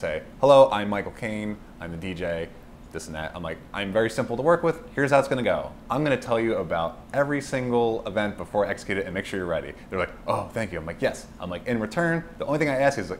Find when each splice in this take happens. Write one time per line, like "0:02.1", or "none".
none